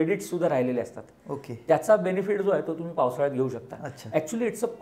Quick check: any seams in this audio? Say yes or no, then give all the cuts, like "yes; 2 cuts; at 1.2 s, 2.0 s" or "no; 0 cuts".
no; 0 cuts